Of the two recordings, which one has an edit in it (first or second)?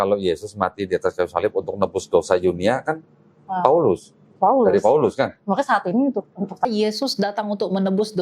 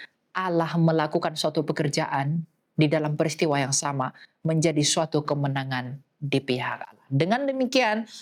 first